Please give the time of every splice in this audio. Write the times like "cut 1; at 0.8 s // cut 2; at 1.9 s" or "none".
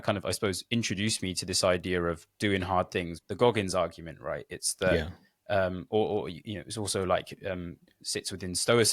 cut 1; at 3.2 s